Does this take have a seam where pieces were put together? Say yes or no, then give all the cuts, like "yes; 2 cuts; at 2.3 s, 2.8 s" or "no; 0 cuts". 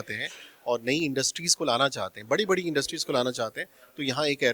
no; 0 cuts